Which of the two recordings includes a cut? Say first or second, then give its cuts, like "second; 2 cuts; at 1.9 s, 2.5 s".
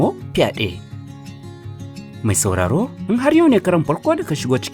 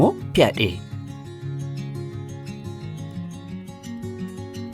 second; 1 cut; at 1.2 s